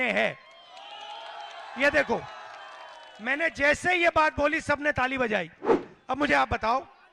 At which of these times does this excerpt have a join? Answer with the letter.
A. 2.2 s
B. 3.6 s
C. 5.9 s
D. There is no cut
C